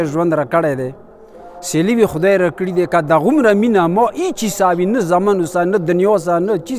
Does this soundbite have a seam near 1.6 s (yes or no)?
no